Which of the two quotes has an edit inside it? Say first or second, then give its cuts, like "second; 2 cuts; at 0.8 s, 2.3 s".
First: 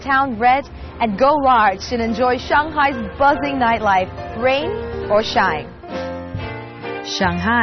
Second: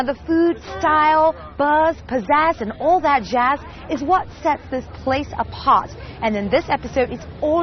second; 1 cut; at 6.5 s